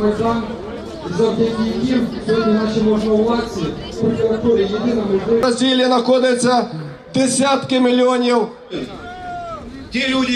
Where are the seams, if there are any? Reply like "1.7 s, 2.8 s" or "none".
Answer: none